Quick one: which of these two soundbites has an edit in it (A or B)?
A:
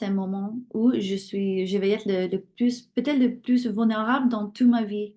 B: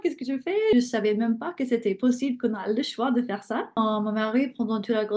B